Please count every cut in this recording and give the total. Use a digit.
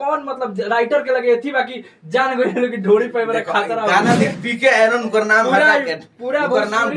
1